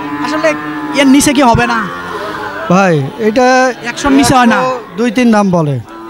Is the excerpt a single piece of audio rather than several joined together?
yes; 0 cuts

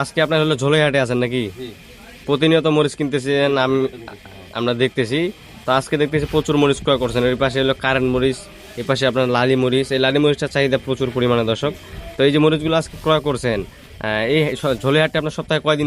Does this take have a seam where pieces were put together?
no; 0 cuts

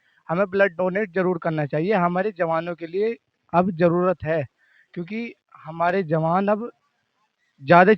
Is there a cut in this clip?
no; 0 cuts

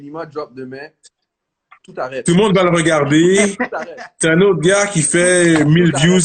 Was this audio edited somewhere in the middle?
no; 0 cuts

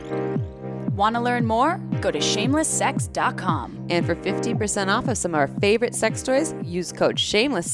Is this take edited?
yes; 1 cut; at 0.9 s

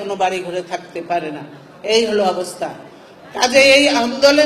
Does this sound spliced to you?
no; 0 cuts

